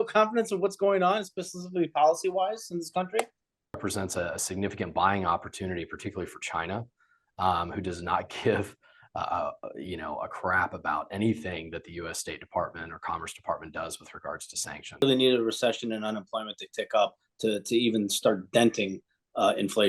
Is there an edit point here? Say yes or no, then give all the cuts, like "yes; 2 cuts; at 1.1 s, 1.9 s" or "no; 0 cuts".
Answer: yes; 2 cuts; at 3.8 s, 15.0 s